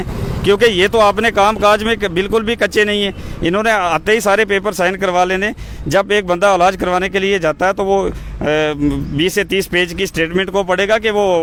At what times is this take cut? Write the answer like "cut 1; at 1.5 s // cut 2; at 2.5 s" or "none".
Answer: none